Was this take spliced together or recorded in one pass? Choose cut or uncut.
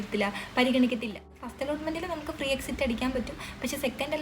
cut